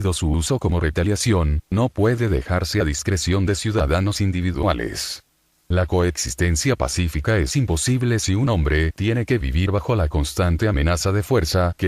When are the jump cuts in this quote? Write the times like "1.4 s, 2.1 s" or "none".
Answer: 2.8 s